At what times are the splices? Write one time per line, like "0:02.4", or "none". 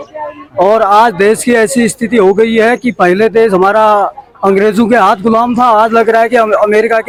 none